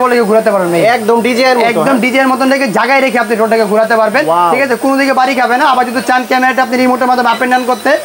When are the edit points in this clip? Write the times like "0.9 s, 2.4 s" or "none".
none